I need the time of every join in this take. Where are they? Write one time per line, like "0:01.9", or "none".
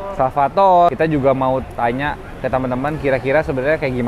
0:00.9